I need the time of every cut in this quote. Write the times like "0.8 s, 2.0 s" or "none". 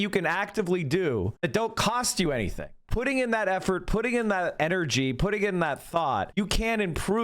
1.3 s, 2.8 s, 4.5 s, 6.3 s